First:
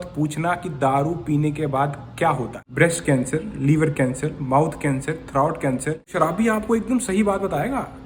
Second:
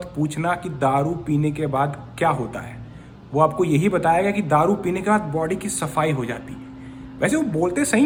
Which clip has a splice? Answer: first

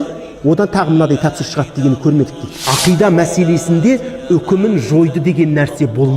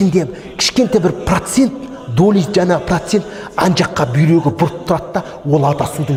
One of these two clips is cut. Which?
first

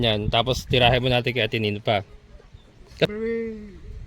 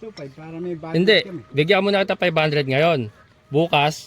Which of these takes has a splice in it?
first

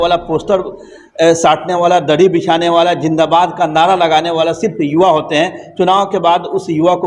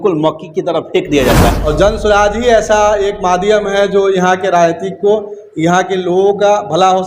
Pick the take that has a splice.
second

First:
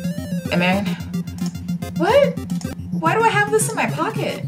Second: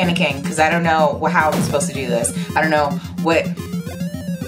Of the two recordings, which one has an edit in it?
first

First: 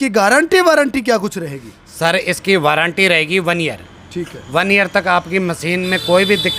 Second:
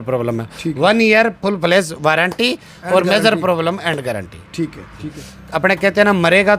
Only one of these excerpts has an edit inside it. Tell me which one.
second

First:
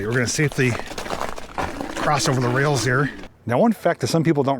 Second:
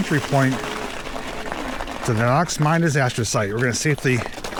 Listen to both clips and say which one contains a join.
first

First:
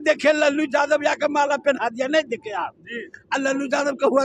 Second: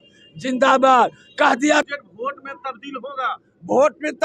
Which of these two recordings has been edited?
second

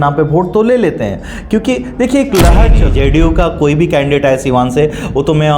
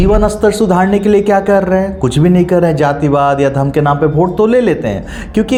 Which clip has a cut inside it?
first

